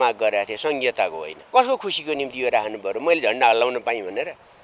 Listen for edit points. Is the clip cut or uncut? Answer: cut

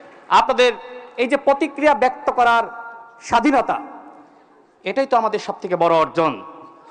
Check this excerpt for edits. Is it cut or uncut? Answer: uncut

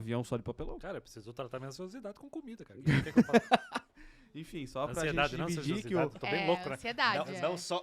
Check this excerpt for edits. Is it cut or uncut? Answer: uncut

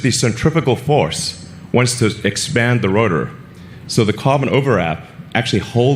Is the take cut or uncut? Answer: uncut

